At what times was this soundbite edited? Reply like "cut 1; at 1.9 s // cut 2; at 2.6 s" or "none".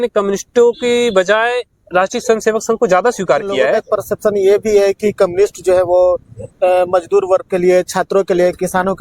cut 1; at 3.8 s